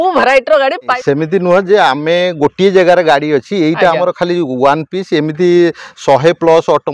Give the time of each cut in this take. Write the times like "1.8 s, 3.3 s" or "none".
0.9 s